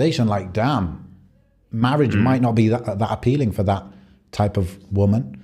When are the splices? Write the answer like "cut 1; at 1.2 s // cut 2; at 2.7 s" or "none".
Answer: none